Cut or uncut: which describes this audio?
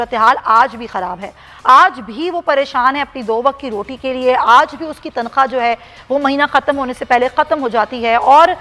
uncut